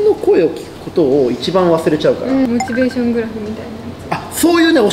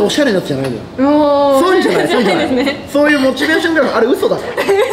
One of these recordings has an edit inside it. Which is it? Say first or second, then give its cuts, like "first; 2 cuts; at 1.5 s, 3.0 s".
first; 1 cut; at 2.5 s